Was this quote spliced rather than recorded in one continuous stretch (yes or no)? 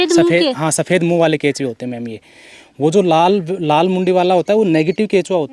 no